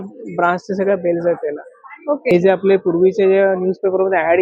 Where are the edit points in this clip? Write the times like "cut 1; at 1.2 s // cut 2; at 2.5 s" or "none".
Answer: cut 1; at 2.3 s